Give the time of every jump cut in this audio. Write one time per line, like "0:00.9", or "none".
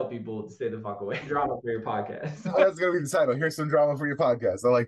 0:01.2
0:02.5